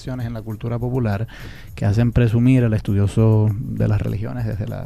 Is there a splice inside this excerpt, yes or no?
yes